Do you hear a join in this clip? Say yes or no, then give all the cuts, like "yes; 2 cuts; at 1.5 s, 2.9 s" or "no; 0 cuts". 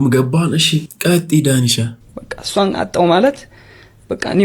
yes; 1 cut; at 1.8 s